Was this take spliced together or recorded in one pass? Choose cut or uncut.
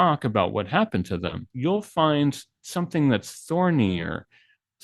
cut